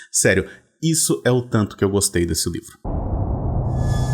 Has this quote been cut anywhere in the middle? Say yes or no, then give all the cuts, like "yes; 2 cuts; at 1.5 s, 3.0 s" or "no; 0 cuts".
yes; 1 cut; at 2.7 s